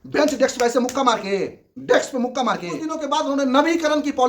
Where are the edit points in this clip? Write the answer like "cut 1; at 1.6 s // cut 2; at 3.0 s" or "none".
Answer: cut 1; at 3.0 s